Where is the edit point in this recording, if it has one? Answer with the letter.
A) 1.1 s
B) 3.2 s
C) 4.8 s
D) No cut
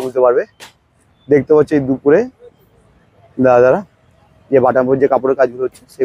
D